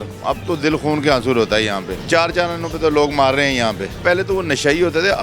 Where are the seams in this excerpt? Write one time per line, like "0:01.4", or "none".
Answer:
0:01.9
0:04.0